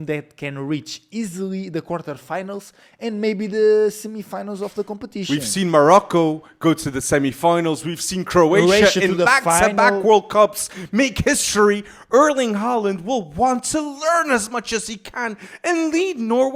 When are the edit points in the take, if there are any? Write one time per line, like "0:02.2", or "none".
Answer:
none